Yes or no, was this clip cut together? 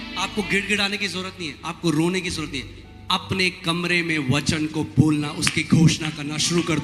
no